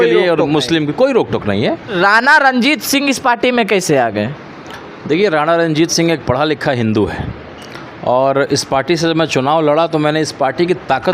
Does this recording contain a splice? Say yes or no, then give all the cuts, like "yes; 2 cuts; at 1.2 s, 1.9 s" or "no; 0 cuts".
yes; 1 cut; at 1.9 s